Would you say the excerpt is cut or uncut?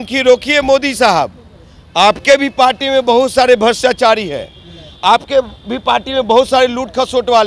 uncut